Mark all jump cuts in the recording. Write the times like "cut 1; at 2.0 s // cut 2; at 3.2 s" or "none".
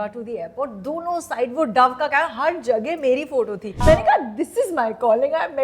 cut 1; at 3.7 s